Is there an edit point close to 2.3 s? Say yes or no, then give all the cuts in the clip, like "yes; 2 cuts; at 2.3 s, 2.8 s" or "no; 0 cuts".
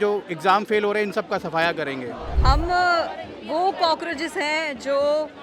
yes; 1 cut; at 2.3 s